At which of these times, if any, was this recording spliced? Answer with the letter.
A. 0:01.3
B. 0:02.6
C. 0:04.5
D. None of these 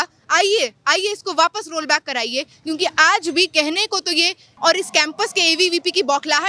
C